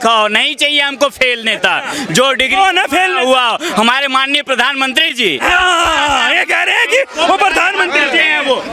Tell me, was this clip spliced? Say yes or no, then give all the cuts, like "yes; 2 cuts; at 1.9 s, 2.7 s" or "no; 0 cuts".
no; 0 cuts